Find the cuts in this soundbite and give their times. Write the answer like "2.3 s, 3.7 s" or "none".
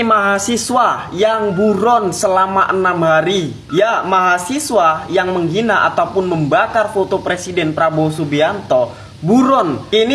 none